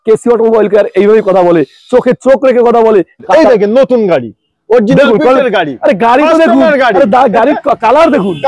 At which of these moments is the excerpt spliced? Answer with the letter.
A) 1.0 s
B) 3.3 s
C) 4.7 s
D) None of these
B